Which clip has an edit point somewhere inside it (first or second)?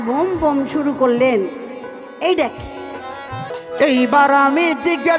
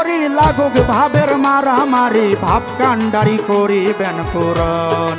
first